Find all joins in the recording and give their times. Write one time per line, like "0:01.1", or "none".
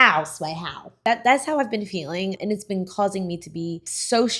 0:00.9
0:02.4